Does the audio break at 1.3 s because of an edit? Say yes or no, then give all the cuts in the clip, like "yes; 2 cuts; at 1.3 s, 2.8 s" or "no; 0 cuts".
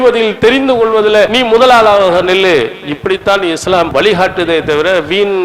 yes; 2 cuts; at 1.3 s, 3.9 s